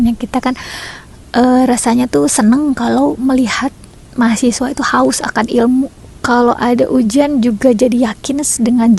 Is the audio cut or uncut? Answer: cut